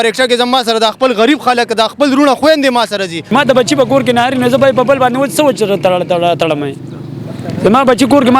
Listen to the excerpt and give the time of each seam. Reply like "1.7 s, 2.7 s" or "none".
3.1 s

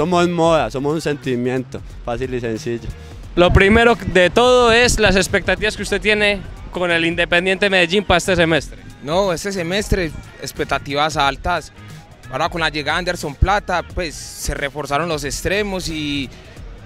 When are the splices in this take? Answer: none

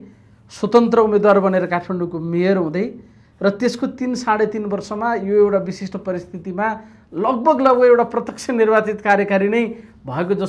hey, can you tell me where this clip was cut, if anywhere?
none

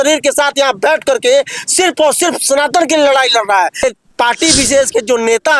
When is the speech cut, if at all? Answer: 3.8 s

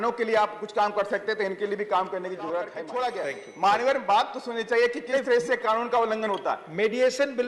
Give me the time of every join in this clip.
2.7 s

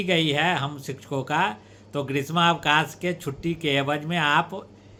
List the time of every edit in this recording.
none

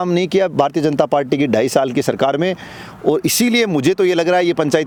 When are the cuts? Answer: none

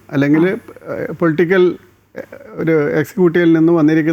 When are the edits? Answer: none

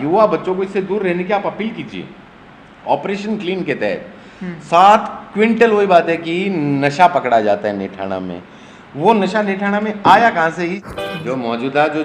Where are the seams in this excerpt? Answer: 10.9 s

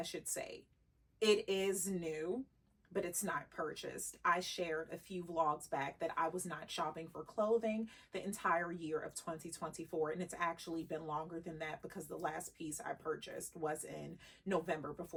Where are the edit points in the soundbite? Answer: none

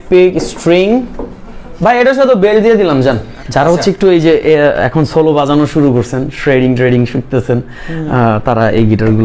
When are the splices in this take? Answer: 3.3 s

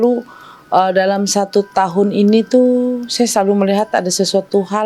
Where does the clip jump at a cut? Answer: none

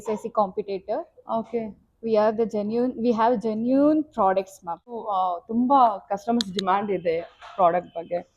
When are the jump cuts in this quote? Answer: 4.9 s

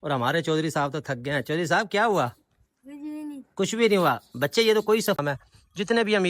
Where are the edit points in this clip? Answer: 5.2 s

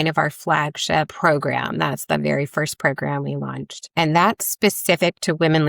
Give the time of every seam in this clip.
1.1 s

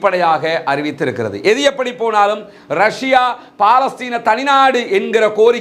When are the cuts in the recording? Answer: none

